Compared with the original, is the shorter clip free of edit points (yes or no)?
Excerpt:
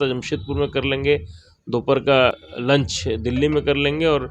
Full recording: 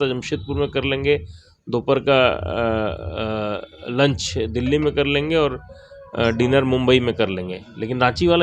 no